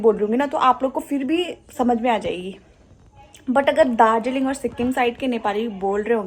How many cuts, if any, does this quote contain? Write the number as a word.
zero